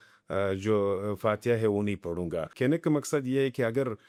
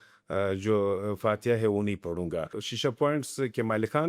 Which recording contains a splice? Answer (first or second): second